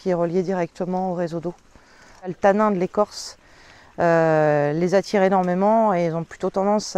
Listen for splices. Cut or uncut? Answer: cut